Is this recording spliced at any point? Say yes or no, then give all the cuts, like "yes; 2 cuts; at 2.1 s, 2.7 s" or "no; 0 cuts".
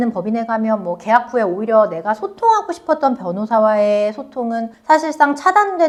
no; 0 cuts